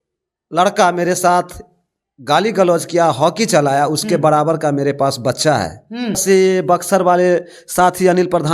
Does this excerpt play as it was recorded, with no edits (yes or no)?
no